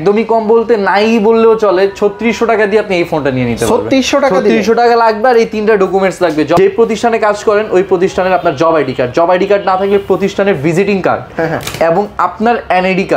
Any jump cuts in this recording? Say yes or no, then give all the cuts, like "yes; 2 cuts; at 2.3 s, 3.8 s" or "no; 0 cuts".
no; 0 cuts